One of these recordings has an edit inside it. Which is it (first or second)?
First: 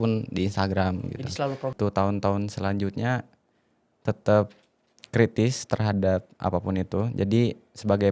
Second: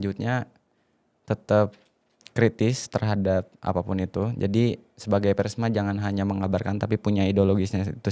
first